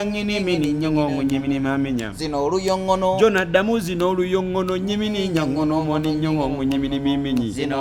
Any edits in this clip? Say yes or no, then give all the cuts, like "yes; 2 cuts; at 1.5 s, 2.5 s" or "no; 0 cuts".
no; 0 cuts